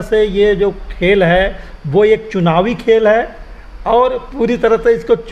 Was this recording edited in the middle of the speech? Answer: no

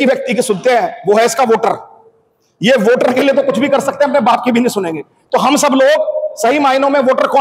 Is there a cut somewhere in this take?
no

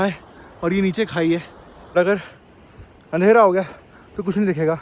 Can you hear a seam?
yes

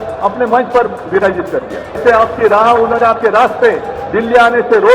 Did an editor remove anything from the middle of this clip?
yes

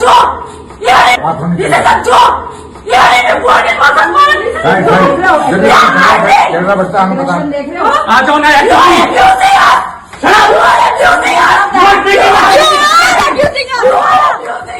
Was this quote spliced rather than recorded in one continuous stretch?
no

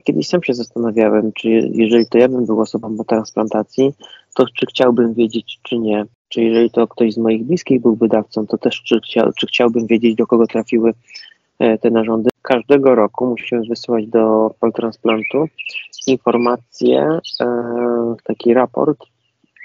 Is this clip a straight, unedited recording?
no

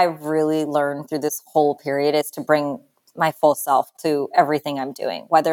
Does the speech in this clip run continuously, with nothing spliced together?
yes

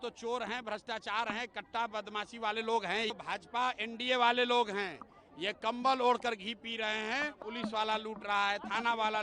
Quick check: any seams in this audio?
yes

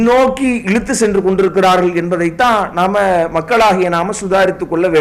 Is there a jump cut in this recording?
no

